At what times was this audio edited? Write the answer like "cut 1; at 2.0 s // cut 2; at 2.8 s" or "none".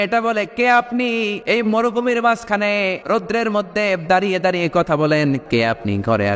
cut 1; at 1.4 s // cut 2; at 3.0 s // cut 3; at 5.4 s